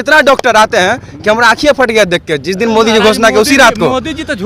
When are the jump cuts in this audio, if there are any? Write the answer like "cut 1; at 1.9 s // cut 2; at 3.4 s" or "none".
none